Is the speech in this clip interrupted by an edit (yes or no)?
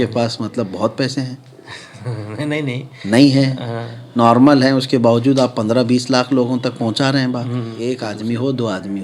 yes